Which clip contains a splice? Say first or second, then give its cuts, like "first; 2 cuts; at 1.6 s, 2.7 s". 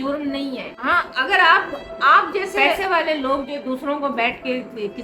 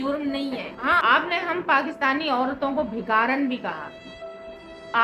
second; 1 cut; at 1.0 s